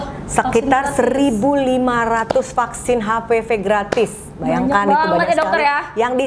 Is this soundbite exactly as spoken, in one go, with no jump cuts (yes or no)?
yes